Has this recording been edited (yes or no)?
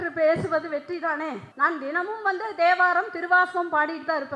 yes